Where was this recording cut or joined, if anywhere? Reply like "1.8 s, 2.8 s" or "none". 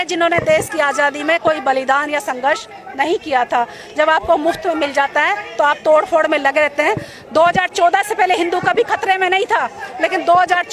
none